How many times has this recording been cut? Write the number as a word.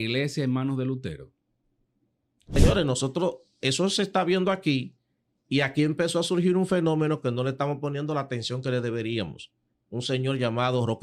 one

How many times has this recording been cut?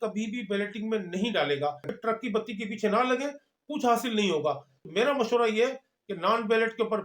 two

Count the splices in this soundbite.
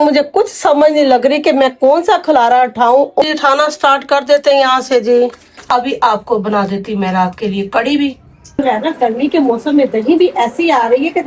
three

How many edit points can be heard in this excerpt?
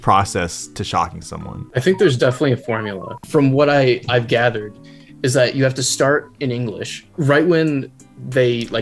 one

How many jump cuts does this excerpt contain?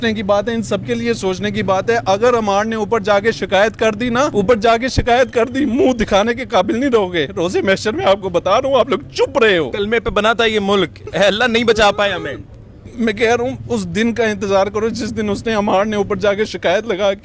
two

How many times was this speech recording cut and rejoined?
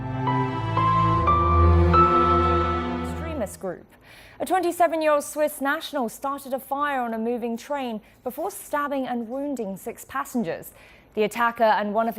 zero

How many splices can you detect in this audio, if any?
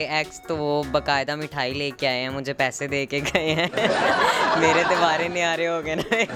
zero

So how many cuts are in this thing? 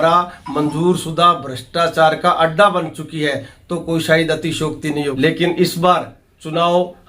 one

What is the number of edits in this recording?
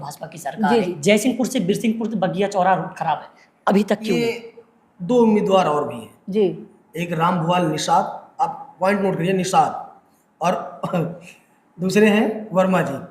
one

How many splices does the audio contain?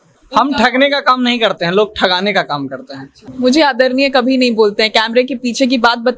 one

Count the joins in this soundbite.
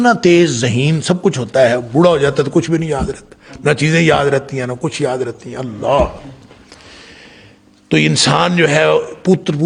zero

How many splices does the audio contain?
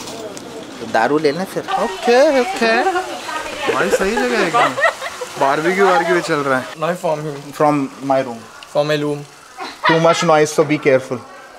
two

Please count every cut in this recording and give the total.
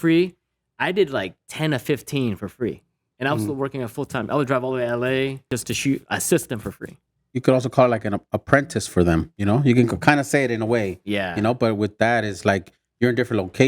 two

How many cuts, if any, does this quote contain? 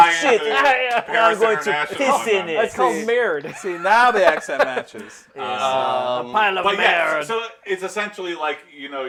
zero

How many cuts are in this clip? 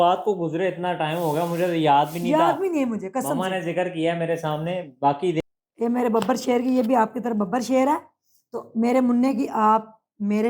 one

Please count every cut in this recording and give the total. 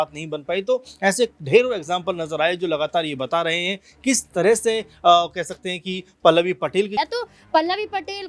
one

